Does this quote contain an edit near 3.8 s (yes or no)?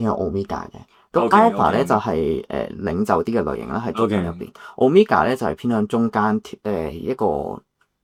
no